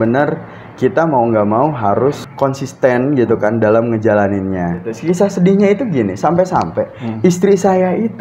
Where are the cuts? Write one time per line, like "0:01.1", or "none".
0:02.3
0:04.9